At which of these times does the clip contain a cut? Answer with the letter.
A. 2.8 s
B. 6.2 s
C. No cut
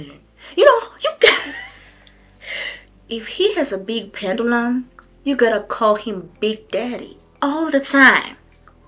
A